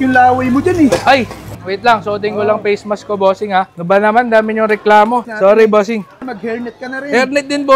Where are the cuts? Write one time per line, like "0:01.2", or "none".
0:05.3
0:06.1